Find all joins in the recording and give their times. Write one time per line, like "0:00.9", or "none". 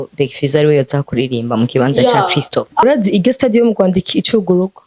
0:02.8